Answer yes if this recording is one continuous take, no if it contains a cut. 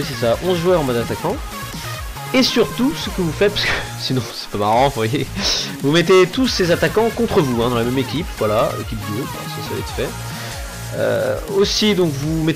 no